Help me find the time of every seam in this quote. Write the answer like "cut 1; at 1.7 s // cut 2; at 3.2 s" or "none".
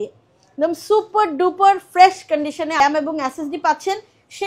cut 1; at 2.8 s

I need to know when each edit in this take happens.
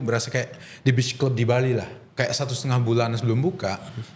cut 1; at 2.0 s

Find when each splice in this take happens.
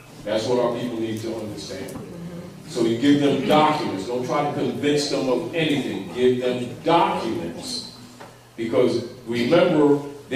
cut 1; at 7.4 s

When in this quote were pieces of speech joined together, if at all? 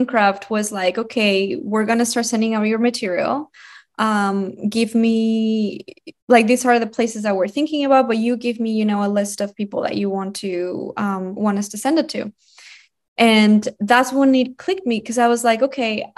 none

